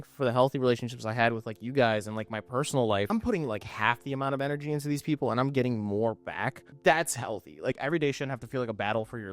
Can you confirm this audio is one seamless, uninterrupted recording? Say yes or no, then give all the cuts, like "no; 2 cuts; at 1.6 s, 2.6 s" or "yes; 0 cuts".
no; 3 cuts; at 3.1 s, 6.6 s, 7.7 s